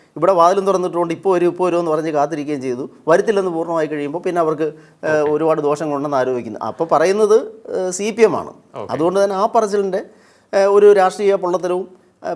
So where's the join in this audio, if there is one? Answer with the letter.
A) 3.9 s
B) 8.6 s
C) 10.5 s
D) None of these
D